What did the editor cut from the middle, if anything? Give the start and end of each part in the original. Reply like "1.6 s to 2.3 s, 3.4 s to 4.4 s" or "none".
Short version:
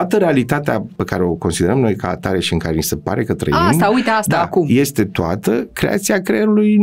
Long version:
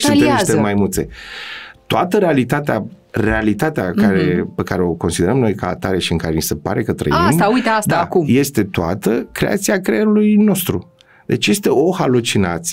3.0 s to 4.6 s